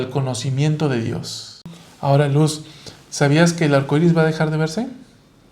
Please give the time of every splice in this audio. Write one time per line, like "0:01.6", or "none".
0:01.8